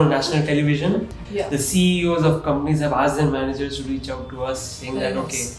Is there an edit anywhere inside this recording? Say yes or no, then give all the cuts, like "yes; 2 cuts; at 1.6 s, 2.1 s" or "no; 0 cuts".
yes; 1 cut; at 1.1 s